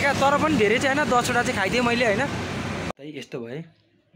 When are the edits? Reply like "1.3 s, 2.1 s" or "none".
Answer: 2.9 s